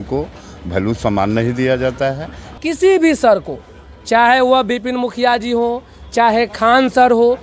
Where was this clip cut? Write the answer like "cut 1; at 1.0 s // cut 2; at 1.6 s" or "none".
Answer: cut 1; at 2.5 s

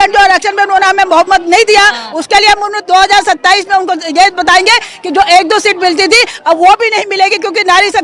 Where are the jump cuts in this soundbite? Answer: none

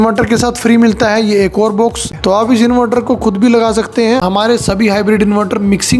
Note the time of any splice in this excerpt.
cut 1; at 2.1 s // cut 2; at 4.2 s

